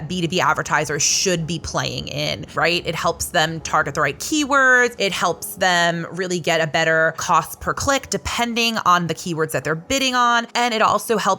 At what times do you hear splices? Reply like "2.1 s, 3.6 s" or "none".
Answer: 2.4 s, 4.9 s, 7.2 s, 10.5 s